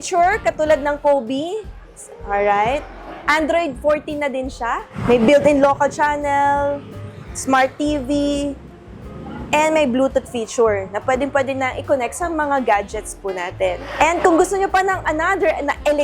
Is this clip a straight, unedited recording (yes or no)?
yes